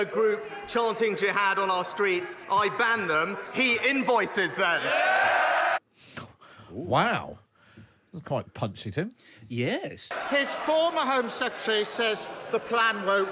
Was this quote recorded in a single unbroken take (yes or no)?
no